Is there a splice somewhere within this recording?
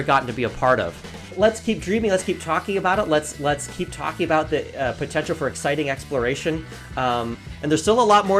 yes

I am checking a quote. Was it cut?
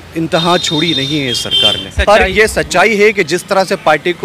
yes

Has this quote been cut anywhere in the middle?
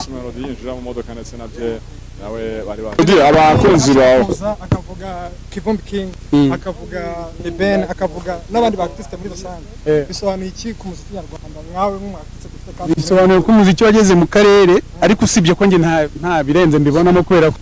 yes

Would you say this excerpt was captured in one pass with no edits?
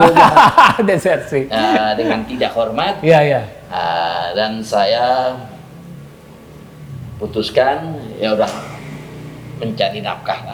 yes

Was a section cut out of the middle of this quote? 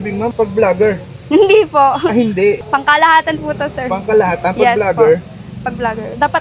no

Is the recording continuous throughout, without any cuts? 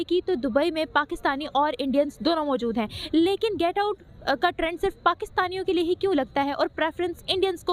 yes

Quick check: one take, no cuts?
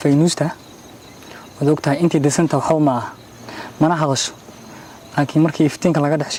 yes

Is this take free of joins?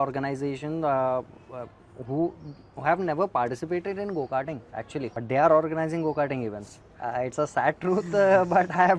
no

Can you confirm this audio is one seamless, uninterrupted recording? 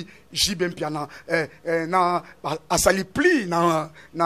yes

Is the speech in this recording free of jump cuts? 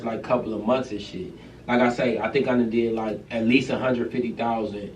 no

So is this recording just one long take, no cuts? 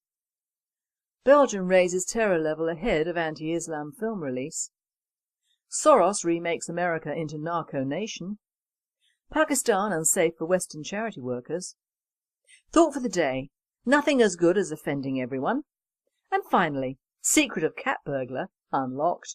yes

